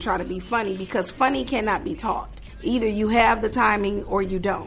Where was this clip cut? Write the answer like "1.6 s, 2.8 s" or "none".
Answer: 2.4 s